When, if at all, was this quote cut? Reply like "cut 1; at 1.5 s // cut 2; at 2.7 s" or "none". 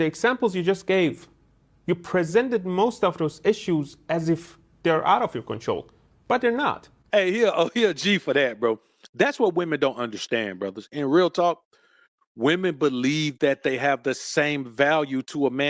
cut 1; at 6.9 s